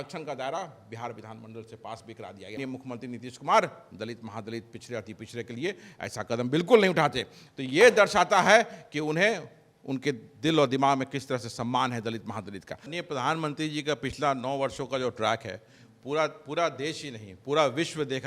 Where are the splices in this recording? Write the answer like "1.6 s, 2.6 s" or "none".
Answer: 2.6 s, 12.9 s